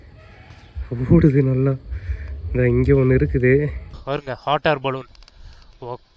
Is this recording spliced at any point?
yes; 1 cut; at 3.9 s

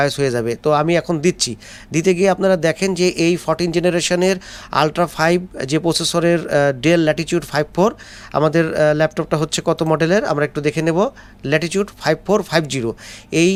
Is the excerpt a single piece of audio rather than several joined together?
yes; 0 cuts

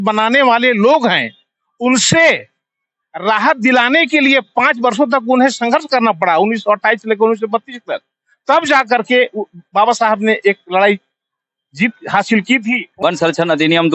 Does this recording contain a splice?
yes; 1 cut; at 12.9 s

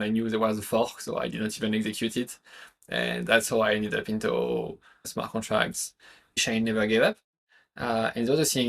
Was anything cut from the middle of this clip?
yes; 2 cuts; at 5.1 s, 6.4 s

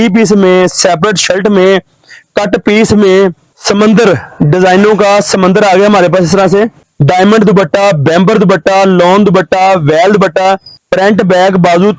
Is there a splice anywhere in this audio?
yes; 3 cuts; at 3.5 s, 6.9 s, 10.7 s

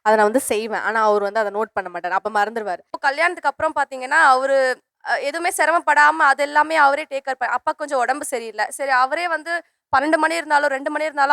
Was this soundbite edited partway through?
yes; 1 cut; at 3.0 s

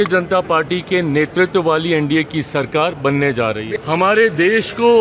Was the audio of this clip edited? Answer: yes; 1 cut; at 3.7 s

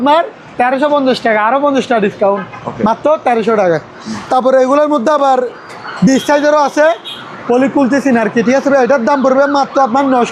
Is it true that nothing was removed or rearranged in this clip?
yes; 0 cuts

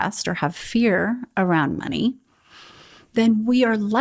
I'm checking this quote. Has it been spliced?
no; 0 cuts

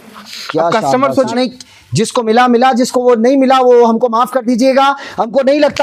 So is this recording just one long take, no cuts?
no; 1 cut; at 1.3 s

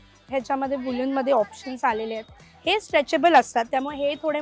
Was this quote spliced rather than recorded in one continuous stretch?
no; 0 cuts

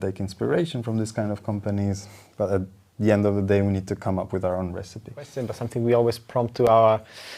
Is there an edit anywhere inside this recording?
yes; 1 cut; at 5.3 s

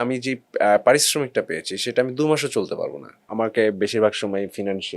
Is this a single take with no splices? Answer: no; 1 cut; at 3.3 s

